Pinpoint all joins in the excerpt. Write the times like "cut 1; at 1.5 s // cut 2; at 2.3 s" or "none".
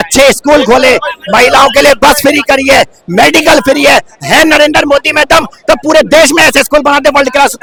none